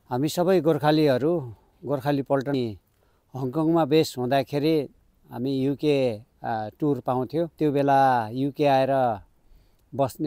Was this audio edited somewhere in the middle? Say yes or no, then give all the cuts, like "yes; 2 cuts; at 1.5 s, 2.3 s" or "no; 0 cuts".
yes; 2 cuts; at 2.5 s, 7.5 s